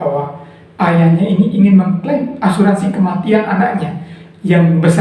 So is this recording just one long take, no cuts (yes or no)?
yes